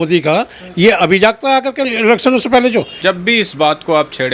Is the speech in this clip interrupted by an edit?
yes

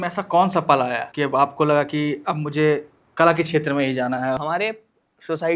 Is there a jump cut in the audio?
yes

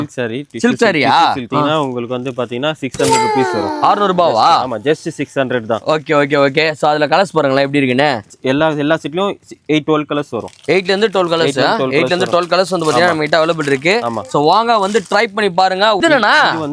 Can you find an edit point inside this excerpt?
yes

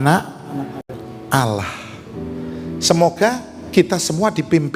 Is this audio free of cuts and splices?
yes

